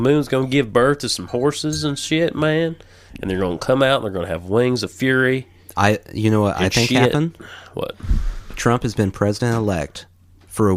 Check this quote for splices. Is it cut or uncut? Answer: uncut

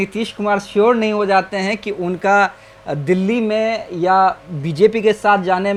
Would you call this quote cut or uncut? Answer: uncut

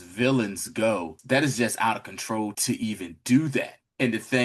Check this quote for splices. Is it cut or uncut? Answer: cut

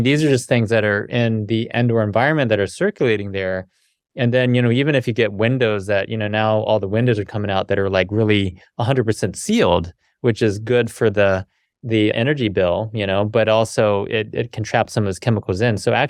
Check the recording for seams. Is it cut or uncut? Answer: uncut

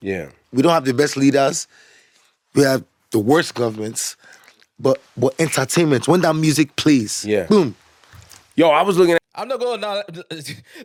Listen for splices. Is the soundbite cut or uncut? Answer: uncut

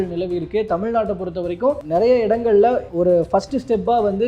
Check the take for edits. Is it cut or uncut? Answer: cut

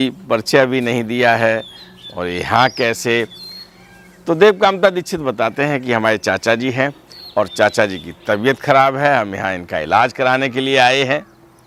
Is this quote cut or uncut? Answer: uncut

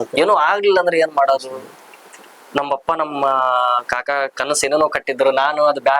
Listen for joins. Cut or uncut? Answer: uncut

